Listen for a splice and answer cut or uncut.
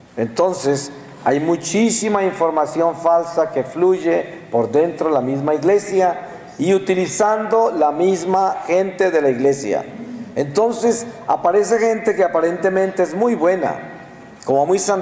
cut